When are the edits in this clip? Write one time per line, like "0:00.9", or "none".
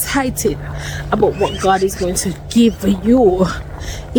none